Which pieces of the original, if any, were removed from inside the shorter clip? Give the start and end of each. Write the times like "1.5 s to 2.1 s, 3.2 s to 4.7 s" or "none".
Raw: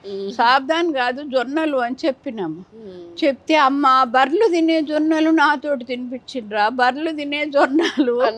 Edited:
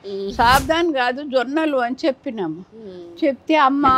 none